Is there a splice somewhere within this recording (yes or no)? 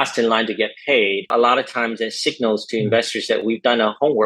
yes